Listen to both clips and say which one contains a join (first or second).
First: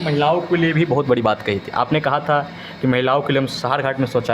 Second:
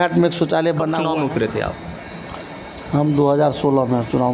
second